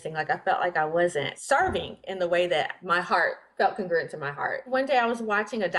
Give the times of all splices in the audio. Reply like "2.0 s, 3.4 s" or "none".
1.3 s, 2.8 s, 4.6 s